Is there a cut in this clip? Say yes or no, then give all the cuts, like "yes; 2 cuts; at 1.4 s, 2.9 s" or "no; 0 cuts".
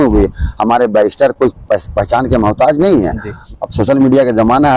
yes; 1 cut; at 3.4 s